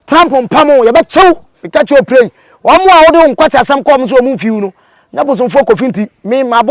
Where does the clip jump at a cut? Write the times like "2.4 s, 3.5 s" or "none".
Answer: none